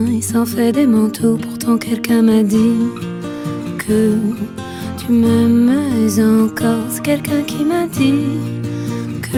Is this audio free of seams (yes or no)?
yes